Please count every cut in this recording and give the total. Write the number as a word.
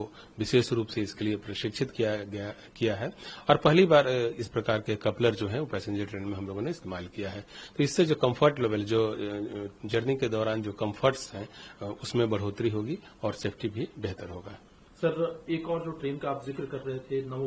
zero